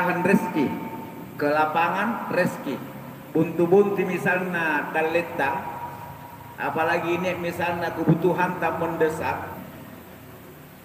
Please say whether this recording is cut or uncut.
cut